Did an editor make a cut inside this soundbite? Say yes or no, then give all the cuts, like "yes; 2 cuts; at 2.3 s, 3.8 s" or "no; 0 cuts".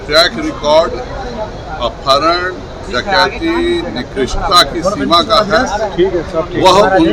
no; 0 cuts